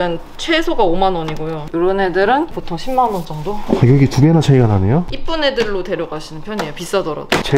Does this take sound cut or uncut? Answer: cut